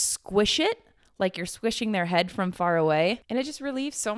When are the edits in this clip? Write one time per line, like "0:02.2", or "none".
0:03.2